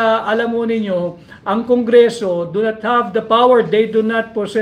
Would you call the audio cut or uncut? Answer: uncut